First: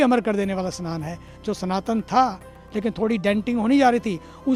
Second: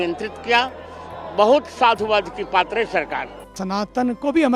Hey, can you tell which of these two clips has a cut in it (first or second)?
second